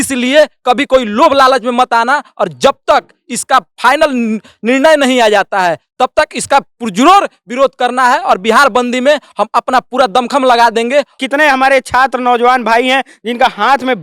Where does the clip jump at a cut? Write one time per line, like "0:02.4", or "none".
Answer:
0:11.1